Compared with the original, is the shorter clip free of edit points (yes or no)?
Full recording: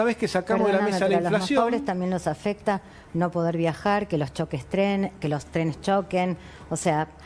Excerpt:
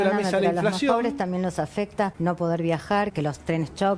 no